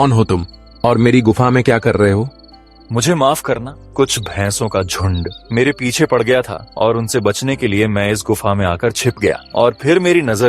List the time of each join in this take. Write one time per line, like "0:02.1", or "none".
0:03.8
0:05.4
0:06.6
0:09.4